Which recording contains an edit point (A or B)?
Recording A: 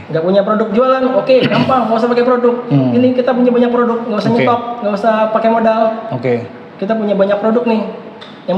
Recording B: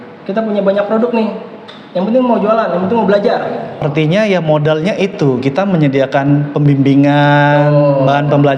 B